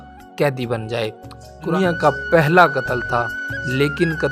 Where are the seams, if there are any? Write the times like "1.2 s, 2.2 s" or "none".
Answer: 1.7 s